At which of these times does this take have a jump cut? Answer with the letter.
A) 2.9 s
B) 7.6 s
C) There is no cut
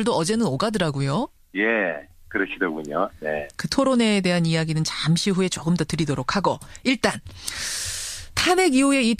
B